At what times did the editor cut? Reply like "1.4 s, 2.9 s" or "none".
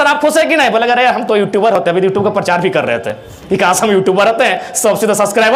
none